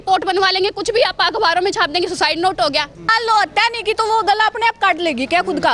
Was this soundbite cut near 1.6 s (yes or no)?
no